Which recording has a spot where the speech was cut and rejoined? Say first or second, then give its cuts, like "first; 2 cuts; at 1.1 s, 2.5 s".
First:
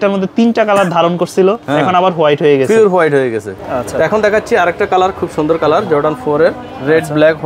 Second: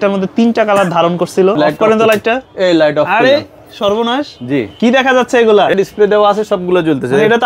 second; 2 cuts; at 1.6 s, 5.7 s